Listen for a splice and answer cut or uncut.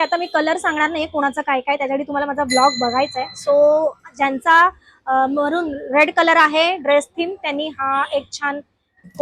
uncut